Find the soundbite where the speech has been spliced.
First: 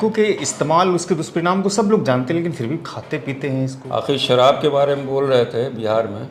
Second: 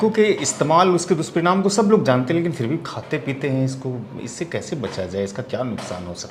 first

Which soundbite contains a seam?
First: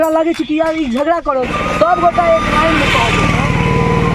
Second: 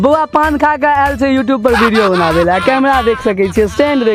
first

